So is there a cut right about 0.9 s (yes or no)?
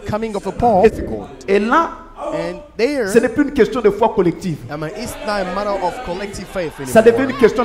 yes